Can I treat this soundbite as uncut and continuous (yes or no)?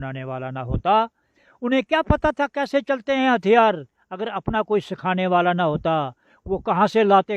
yes